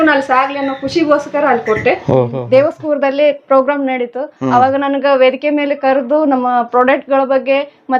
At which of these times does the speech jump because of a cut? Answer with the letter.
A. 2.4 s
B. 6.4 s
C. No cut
A